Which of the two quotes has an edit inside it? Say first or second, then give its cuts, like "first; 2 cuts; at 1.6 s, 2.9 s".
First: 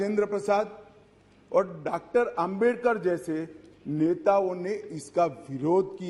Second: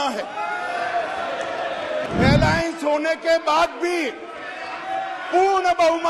second; 1 cut; at 2.1 s